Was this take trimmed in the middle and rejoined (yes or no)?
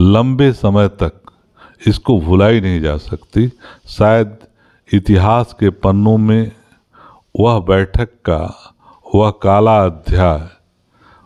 no